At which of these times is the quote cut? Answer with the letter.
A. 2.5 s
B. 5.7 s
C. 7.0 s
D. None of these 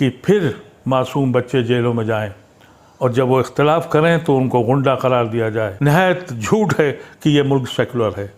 B